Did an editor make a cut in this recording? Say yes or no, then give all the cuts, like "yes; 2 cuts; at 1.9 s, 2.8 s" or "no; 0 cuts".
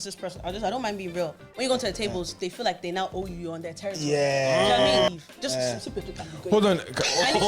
yes; 1 cut; at 5.1 s